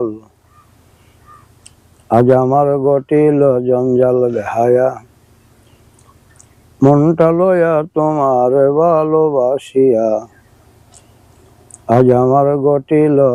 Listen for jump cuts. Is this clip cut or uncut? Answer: uncut